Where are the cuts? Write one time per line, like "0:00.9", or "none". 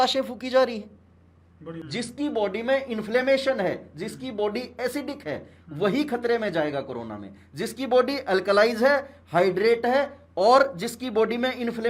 0:01.8